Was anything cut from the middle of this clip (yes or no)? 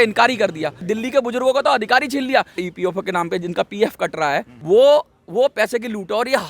yes